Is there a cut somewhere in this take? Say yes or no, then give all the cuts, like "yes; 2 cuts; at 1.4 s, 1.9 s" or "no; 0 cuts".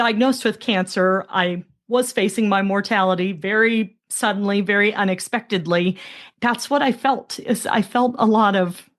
yes; 1 cut; at 6.2 s